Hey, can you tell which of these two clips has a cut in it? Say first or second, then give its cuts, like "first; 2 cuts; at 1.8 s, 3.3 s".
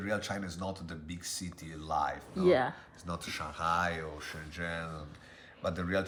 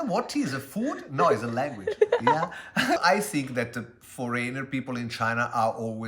second; 1 cut; at 3.0 s